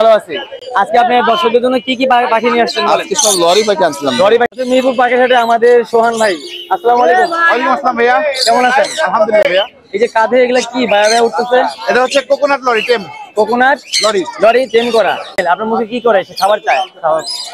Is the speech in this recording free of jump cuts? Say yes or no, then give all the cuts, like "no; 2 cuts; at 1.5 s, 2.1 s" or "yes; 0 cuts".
no; 2 cuts; at 4.5 s, 15.4 s